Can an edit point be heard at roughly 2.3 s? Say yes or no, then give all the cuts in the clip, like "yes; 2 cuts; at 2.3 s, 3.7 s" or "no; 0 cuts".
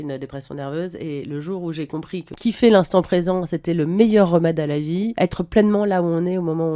yes; 2 cuts; at 2.3 s, 5.1 s